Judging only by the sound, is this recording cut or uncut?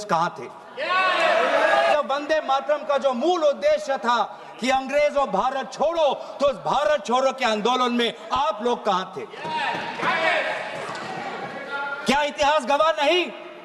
cut